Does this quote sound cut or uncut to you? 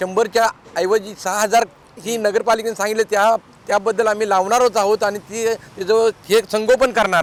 uncut